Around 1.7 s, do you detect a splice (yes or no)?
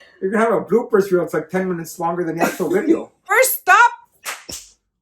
no